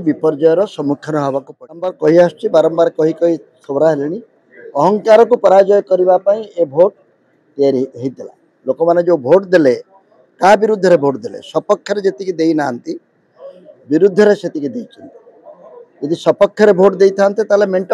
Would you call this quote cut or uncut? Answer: cut